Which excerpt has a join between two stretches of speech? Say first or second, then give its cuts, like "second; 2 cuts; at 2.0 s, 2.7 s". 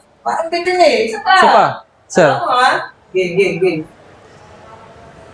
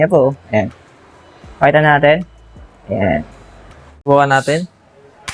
second; 1 cut; at 4.1 s